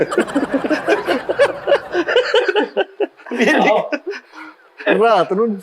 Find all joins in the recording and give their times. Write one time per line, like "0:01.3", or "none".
none